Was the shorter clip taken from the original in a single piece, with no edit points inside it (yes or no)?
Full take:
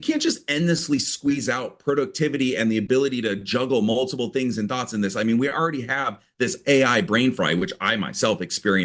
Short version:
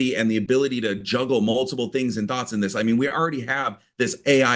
yes